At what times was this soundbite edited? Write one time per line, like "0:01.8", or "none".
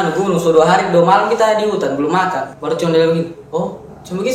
0:02.5